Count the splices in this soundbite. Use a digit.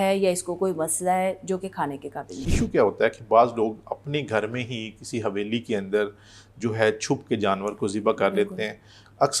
1